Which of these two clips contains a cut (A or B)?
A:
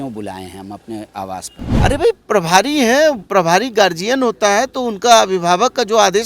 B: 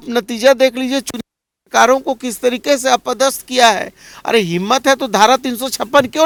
A